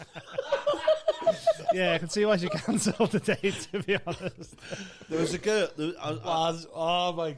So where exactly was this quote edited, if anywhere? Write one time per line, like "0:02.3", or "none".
none